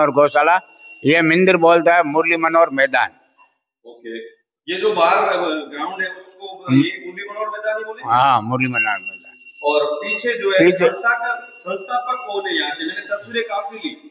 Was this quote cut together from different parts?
no; 0 cuts

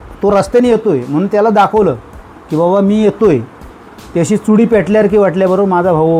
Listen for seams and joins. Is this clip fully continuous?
yes; 0 cuts

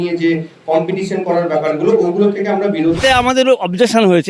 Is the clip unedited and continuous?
no; 1 cut; at 3.0 s

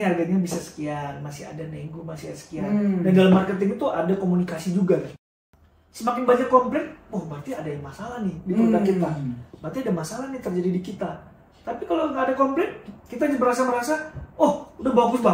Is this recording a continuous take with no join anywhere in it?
no; 1 cut; at 5.2 s

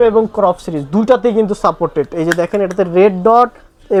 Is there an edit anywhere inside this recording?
no; 0 cuts

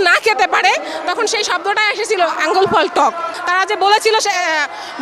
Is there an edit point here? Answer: yes; 1 cut; at 3.3 s

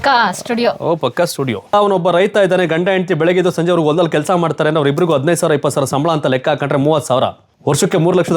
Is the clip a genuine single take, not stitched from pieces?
no; 1 cut; at 1.7 s

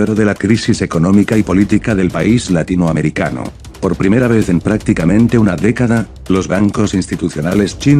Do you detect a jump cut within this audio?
no; 0 cuts

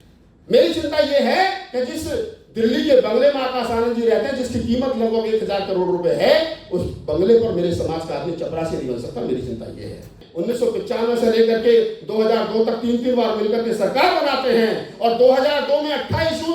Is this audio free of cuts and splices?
no; 1 cut; at 10.2 s

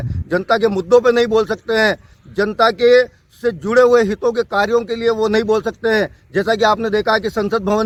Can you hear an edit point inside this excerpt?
no; 0 cuts

